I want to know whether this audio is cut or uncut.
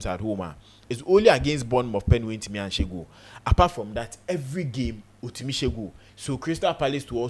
cut